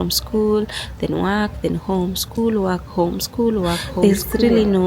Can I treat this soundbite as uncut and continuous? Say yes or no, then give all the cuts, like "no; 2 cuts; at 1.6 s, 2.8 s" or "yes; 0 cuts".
no; 1 cut; at 4.0 s